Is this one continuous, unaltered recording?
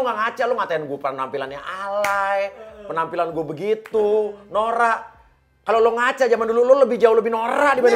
yes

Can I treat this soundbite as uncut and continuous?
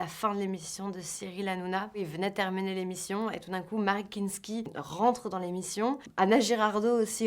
no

